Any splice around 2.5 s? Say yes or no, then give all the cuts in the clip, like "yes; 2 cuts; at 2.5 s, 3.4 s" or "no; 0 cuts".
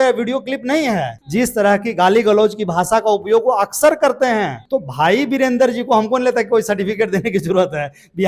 no; 2 cuts; at 1.2 s, 4.6 s